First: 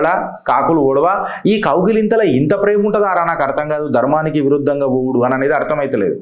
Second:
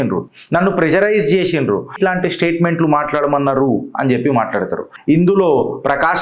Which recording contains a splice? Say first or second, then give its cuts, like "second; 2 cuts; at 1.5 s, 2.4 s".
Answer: second; 2 cuts; at 2.0 s, 4.9 s